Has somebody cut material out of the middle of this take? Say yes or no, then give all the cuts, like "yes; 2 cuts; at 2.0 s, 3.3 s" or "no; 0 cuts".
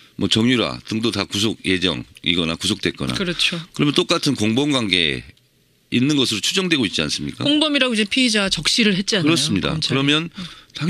yes; 1 cut; at 4.9 s